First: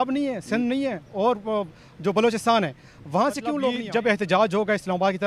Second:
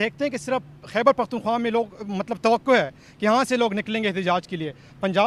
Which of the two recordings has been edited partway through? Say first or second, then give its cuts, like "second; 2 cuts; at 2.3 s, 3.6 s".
first; 1 cut; at 3.6 s